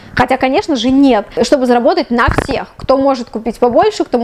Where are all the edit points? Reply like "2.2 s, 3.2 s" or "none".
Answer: 1.3 s